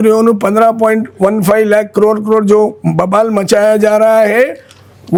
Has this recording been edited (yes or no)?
no